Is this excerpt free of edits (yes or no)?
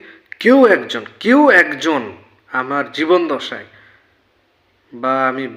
yes